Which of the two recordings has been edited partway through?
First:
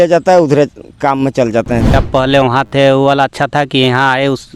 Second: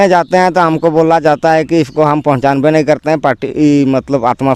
first; 1 cut; at 1.9 s

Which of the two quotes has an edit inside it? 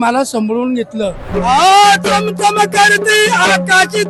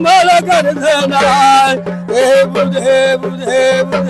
first; 1 cut; at 1.3 s

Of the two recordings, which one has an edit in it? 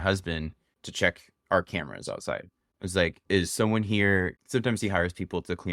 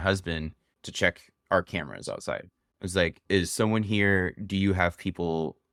first; 1 cut; at 4.4 s

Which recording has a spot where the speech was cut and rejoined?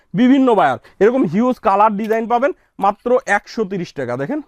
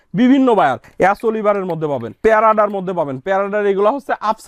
second; 2 cuts; at 0.8 s, 2.1 s

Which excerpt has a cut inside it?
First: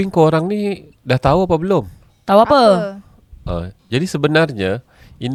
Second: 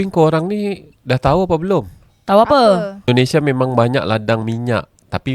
second; 1 cut; at 3.1 s

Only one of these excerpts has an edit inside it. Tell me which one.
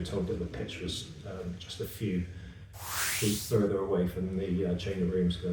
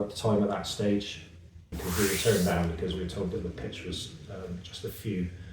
second; 1 cut; at 1.7 s

